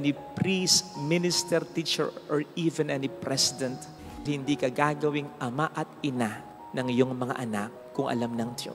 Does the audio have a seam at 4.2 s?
yes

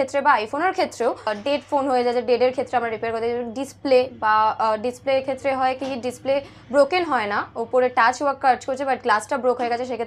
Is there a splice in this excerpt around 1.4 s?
yes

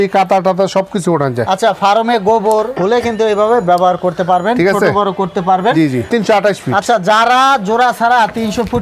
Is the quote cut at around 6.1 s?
yes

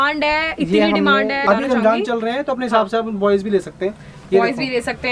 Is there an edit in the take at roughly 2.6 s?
no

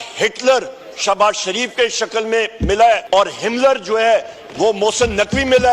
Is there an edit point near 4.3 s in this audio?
no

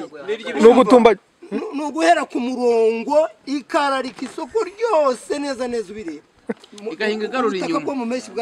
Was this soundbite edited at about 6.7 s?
yes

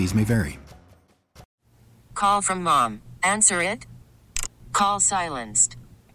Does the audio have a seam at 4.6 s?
no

